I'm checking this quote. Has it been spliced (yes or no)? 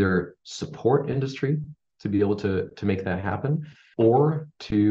yes